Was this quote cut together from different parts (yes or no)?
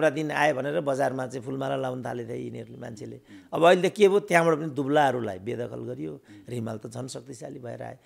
no